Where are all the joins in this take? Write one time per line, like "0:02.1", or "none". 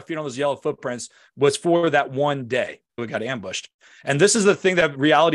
0:03.0

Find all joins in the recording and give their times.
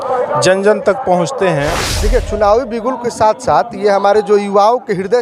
0:01.8

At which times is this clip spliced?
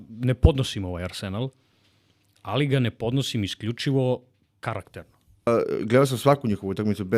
0:05.5

